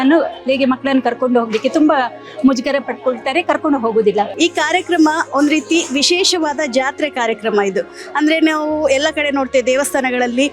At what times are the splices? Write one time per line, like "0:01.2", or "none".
0:04.3